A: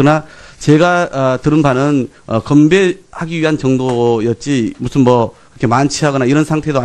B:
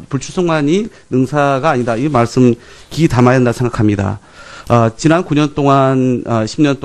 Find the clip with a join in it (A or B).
B